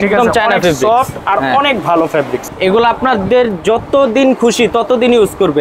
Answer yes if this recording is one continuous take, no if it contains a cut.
no